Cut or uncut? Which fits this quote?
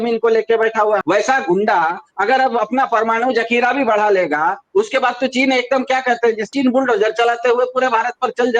cut